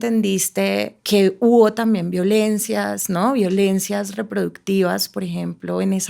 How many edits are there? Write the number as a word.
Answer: one